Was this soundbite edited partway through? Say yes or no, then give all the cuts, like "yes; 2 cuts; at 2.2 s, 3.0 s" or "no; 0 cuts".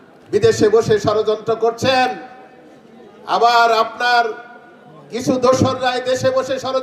no; 0 cuts